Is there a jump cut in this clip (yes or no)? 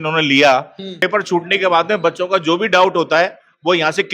yes